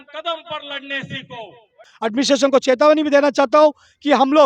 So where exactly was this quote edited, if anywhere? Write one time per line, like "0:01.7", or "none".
0:01.9